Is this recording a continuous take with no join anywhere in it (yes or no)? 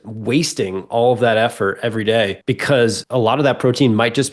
no